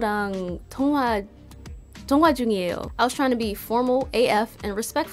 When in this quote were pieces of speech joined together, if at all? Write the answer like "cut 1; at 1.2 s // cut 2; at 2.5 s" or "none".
cut 1; at 2.8 s